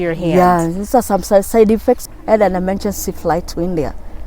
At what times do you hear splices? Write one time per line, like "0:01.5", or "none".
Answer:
0:02.1